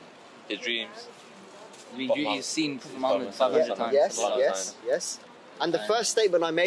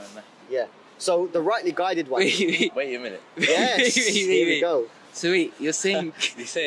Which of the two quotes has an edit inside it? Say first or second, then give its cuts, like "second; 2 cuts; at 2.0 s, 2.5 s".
second; 1 cut; at 1.4 s